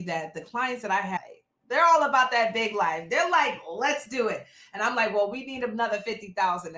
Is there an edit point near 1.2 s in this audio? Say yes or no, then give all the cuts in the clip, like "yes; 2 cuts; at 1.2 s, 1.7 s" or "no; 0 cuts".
yes; 1 cut; at 1.2 s